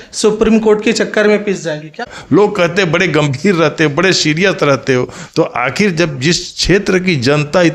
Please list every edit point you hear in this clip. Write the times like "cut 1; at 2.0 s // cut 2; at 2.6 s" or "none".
cut 1; at 2.1 s